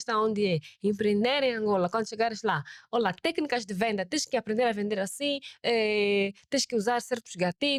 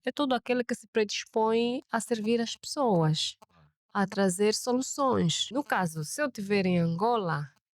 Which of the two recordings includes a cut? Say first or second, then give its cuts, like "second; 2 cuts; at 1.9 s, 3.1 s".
second; 1 cut; at 5.4 s